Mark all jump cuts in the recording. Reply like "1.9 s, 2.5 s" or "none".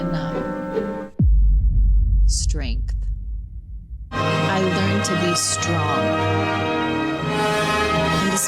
4.1 s